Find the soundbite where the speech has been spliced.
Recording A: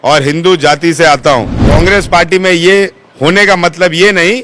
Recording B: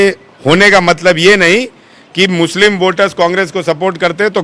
A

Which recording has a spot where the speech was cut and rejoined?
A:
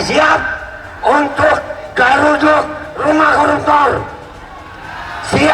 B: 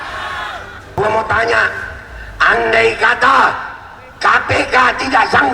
B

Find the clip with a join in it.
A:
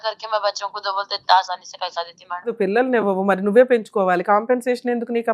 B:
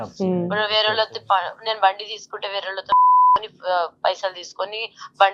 A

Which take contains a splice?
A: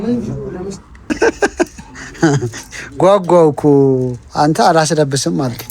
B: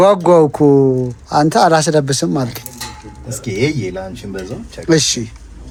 A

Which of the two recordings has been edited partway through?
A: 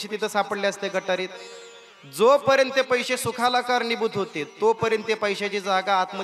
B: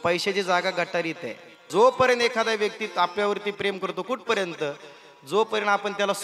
B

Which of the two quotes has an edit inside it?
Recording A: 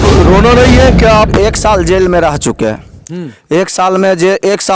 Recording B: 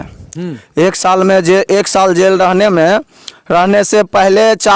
A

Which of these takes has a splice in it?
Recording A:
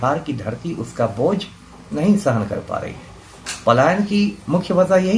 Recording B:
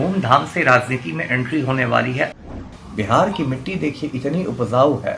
B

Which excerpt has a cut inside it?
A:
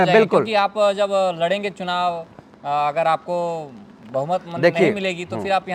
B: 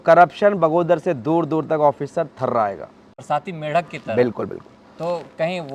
B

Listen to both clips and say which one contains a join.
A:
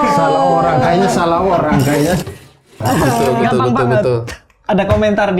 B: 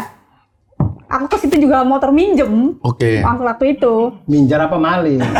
A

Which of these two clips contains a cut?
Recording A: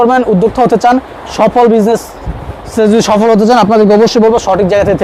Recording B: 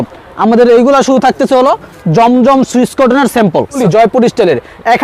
B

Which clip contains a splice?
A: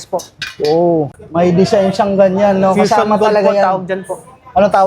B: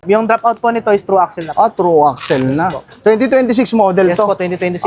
A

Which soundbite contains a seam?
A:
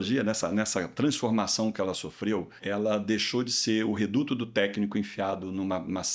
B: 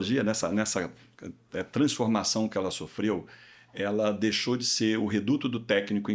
A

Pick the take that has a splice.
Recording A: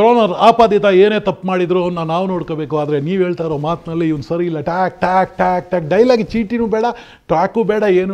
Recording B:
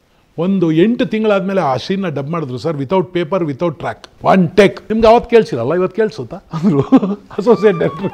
B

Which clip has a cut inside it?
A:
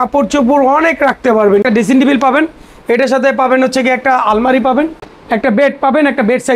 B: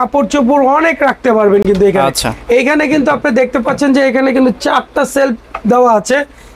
A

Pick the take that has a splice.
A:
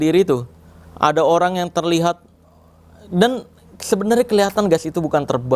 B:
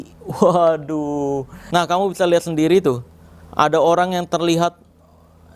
B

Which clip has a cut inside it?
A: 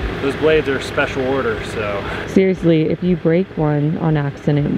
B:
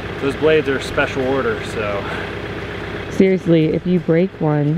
A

